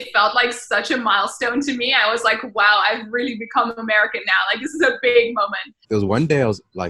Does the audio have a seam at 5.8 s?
yes; 1 cut; at 5.8 s

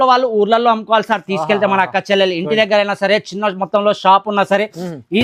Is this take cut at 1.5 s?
no; 0 cuts

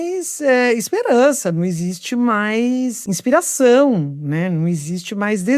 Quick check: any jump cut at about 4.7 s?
no; 1 cut; at 3.0 s

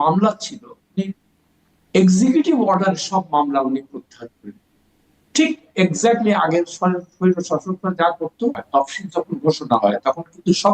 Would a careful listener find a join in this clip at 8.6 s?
yes; 1 cut; at 8.6 s

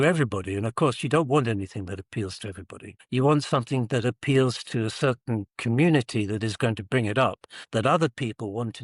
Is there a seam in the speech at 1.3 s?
no; 0 cuts

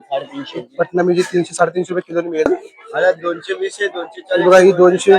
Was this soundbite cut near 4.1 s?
no; 1 cut; at 2.5 s

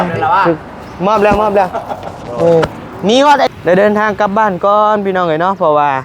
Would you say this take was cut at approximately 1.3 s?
no; 1 cut; at 3.5 s

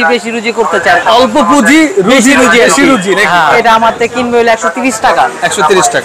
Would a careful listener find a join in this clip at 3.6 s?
yes; 2 cuts; at 1.0 s, 3.6 s

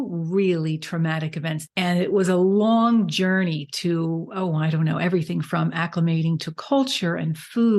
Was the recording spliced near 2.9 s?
no; 1 cut; at 1.6 s

